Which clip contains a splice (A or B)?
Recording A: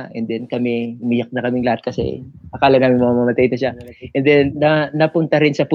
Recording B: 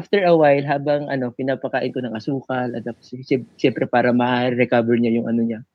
A